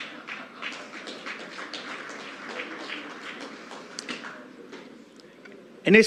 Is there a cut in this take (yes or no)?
no